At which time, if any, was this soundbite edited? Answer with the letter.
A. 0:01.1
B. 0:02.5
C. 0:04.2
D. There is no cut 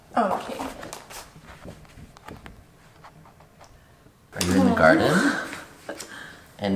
D